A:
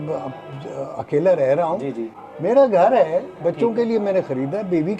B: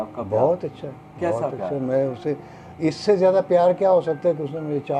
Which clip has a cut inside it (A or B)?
A